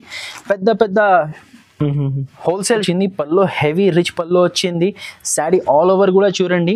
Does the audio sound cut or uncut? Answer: cut